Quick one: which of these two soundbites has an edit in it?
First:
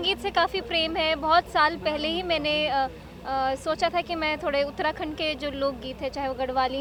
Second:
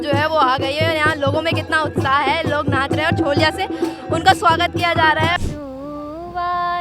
second; 1 cut; at 5.4 s

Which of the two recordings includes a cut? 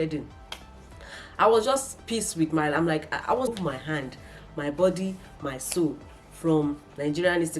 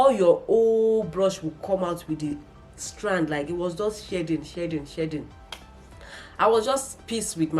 first; 1 cut; at 3.5 s

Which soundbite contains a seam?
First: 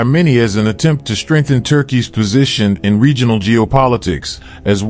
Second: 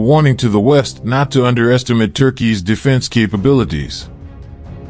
second; 1 cut; at 4.0 s

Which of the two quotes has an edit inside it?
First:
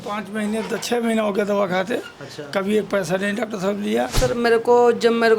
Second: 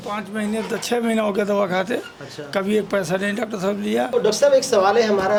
first; 1 cut; at 4.1 s

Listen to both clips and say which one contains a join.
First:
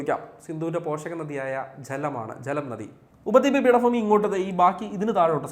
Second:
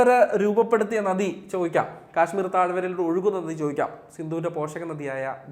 first; 1 cut; at 3.0 s

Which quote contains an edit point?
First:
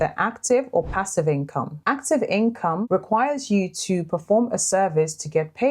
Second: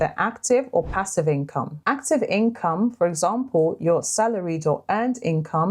first; 1 cut; at 2.8 s

